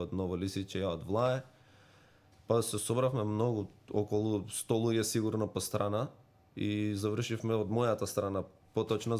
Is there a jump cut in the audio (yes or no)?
no